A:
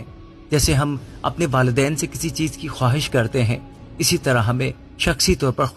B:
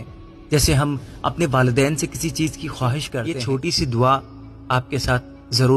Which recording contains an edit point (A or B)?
B